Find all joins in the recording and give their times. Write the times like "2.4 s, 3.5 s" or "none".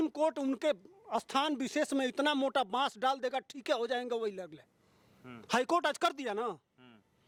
none